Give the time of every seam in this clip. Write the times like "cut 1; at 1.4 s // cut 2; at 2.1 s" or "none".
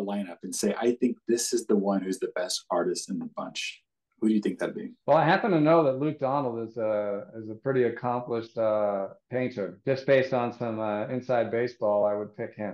none